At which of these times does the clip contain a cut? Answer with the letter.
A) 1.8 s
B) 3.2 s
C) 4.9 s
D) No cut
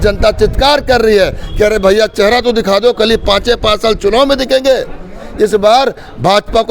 D